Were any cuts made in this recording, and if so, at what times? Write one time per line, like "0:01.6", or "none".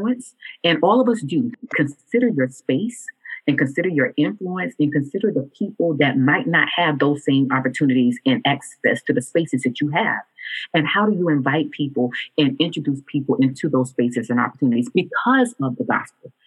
0:01.7